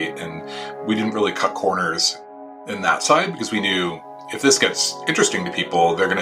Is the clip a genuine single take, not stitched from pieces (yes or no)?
no